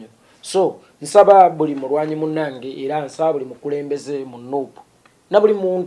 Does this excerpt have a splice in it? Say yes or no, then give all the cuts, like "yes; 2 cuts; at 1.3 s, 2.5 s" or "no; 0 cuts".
no; 0 cuts